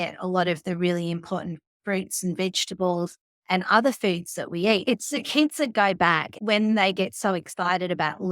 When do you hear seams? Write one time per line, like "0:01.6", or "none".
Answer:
0:04.8
0:06.3